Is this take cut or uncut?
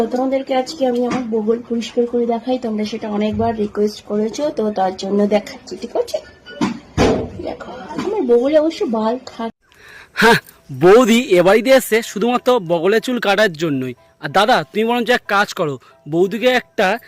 cut